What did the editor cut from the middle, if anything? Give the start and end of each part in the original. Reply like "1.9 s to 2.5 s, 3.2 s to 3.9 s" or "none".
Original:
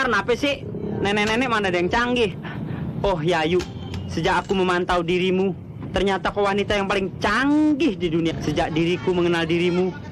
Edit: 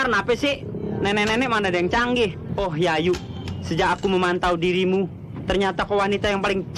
2.4 s to 2.9 s